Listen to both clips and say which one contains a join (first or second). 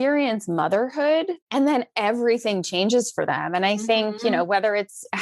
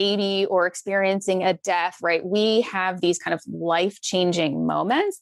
first